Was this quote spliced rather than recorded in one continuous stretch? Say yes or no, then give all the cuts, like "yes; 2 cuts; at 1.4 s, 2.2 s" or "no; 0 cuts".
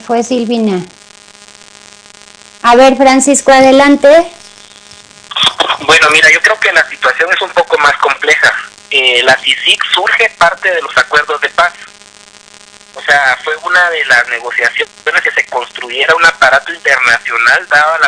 yes; 1 cut; at 6.6 s